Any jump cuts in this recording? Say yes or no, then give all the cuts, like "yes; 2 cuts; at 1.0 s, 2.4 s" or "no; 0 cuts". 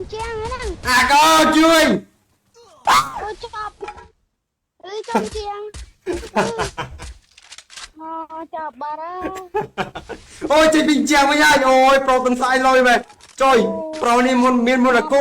yes; 1 cut; at 5.9 s